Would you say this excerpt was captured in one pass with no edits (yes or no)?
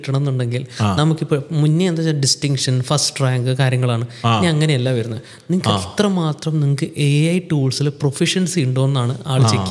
yes